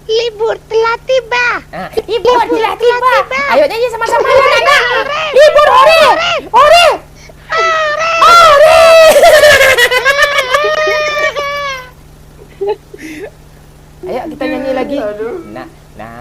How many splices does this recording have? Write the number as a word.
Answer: zero